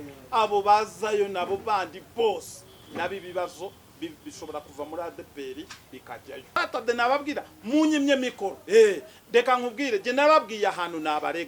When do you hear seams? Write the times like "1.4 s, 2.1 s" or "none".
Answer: 6.6 s